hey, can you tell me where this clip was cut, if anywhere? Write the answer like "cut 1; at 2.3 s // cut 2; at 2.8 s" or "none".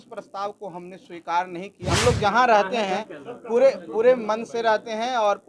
cut 1; at 1.9 s